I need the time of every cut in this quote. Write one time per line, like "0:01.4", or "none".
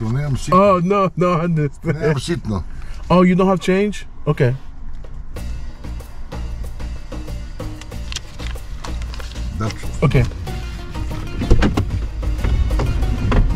none